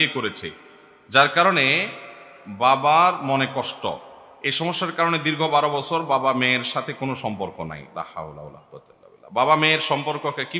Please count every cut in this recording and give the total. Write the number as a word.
zero